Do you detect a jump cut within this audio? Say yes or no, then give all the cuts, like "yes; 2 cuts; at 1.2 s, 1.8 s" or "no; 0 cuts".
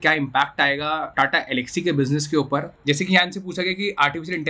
yes; 2 cuts; at 1.1 s, 2.7 s